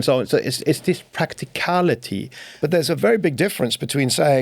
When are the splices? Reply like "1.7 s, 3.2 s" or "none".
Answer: 2.5 s